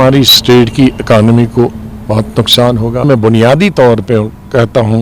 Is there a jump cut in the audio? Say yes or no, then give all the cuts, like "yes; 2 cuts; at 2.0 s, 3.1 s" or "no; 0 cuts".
yes; 1 cut; at 3.0 s